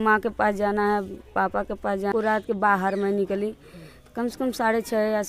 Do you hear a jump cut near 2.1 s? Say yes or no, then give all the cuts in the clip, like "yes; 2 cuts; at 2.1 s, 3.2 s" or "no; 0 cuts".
yes; 1 cut; at 2.1 s